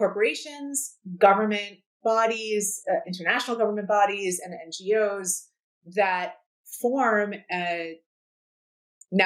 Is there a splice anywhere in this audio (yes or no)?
yes